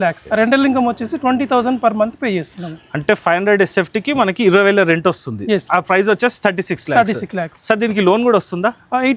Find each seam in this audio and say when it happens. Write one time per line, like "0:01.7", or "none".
none